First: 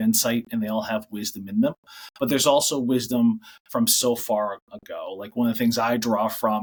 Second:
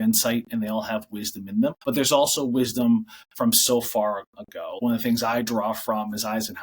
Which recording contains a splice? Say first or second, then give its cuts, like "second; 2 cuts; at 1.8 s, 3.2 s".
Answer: second; 2 cuts; at 1.8 s, 4.6 s